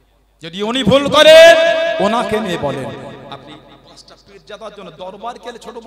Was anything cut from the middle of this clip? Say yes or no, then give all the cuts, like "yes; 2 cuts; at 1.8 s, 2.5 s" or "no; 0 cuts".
no; 0 cuts